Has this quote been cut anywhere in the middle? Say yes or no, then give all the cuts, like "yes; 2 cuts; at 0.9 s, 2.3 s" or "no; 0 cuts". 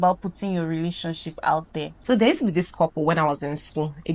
yes; 1 cut; at 1.9 s